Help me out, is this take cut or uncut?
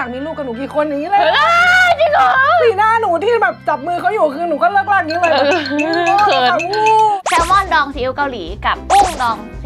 cut